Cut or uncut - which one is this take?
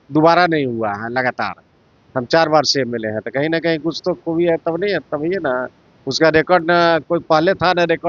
uncut